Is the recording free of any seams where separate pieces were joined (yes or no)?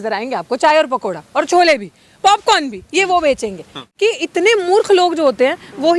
no